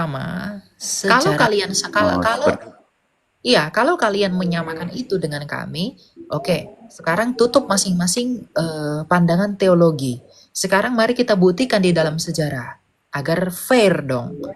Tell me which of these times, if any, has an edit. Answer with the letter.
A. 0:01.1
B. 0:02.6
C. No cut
A